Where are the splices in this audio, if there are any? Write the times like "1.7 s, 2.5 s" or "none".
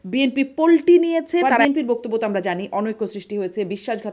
1.5 s